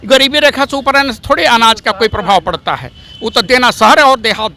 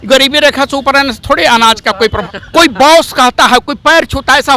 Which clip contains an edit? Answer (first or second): second